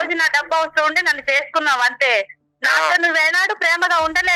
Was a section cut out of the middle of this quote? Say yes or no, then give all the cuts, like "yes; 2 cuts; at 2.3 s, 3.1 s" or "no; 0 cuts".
no; 0 cuts